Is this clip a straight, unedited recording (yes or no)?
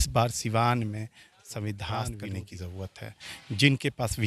no